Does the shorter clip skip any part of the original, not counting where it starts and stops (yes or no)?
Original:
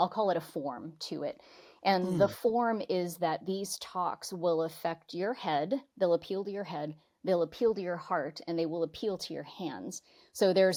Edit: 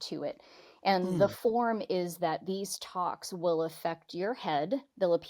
no